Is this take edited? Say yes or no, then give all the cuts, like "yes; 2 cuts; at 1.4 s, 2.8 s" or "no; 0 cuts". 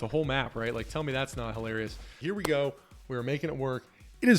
yes; 1 cut; at 2.1 s